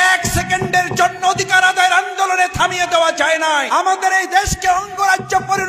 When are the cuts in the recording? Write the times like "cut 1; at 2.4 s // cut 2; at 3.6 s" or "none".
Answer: cut 1; at 3.7 s